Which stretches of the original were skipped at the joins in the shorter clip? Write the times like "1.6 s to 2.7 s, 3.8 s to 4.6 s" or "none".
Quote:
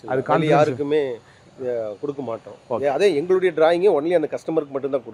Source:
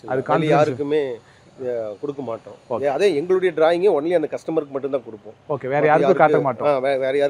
none